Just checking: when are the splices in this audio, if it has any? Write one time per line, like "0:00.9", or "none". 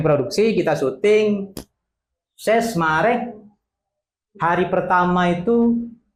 none